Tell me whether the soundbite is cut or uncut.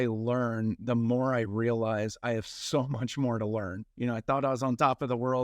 cut